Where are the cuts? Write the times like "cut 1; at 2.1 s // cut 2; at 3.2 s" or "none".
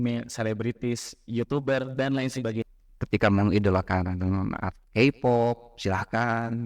cut 1; at 2.7 s